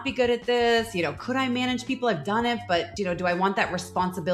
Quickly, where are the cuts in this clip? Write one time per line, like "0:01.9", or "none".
none